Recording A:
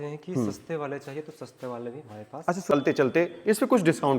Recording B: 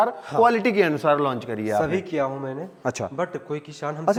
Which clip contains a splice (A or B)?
A